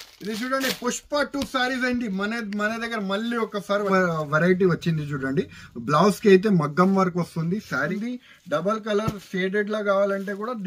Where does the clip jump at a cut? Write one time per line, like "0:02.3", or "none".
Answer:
0:03.9
0:07.9